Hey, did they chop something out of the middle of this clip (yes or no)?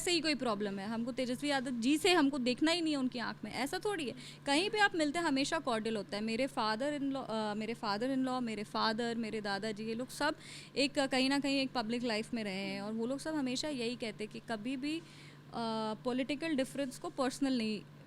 no